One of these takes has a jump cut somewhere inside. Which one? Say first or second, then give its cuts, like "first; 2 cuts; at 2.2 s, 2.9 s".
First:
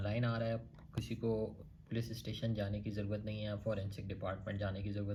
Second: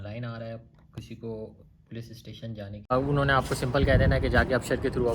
second; 1 cut; at 2.9 s